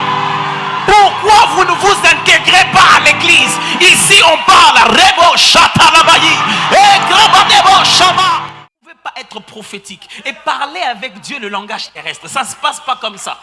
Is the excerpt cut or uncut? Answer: cut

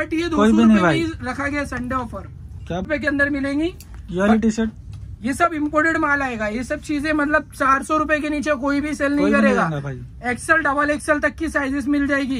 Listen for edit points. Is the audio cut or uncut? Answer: cut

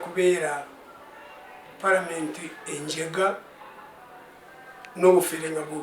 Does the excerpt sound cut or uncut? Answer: uncut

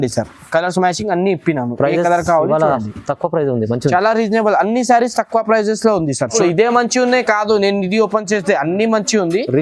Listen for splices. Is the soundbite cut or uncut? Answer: cut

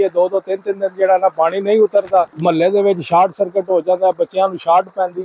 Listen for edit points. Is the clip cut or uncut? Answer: cut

